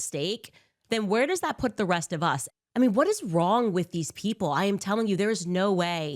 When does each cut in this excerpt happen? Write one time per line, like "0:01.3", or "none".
0:02.4